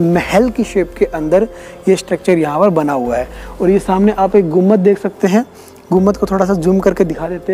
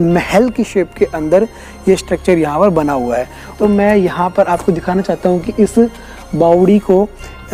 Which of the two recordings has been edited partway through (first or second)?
second